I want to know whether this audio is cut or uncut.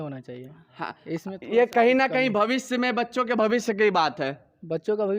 uncut